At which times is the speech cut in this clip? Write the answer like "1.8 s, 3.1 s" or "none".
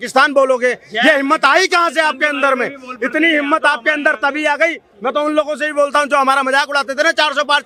none